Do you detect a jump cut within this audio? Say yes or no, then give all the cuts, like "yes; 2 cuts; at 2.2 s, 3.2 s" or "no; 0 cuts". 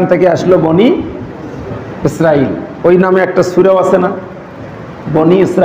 no; 0 cuts